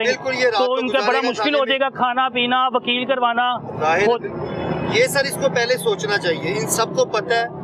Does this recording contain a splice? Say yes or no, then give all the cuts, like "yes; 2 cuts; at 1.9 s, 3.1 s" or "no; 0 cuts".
no; 0 cuts